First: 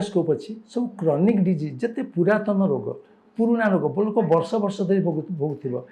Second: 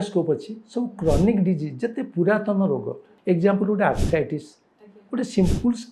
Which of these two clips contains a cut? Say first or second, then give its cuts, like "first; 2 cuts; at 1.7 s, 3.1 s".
second; 1 cut; at 3.1 s